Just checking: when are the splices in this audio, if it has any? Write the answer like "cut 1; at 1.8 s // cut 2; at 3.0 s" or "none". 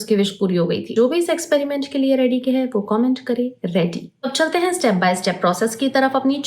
none

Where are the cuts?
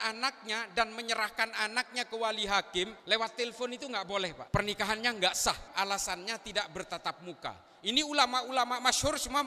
cut 1; at 3.0 s // cut 2; at 4.4 s // cut 3; at 5.7 s

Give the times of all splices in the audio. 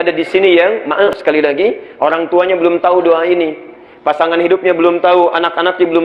cut 1; at 1.1 s

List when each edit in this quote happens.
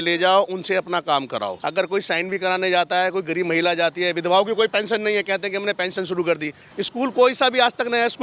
cut 1; at 1.6 s // cut 2; at 6.7 s

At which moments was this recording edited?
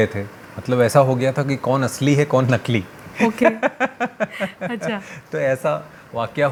none

